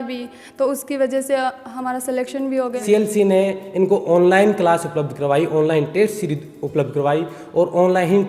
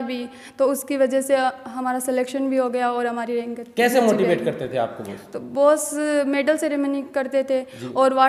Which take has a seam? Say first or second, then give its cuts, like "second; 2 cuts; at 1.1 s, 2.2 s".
first; 1 cut; at 2.8 s